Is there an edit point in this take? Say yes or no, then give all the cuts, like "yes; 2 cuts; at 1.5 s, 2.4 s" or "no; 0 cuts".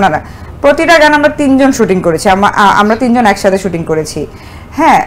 no; 0 cuts